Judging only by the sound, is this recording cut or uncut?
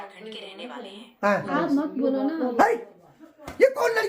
cut